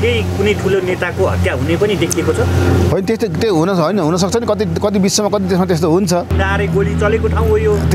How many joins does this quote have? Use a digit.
1